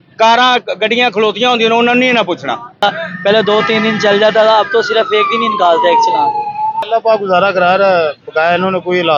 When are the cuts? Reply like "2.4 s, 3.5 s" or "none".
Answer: 2.8 s, 6.8 s